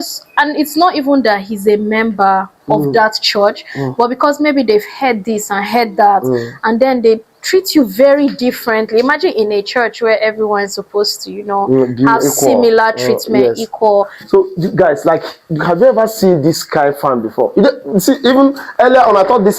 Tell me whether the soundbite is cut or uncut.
cut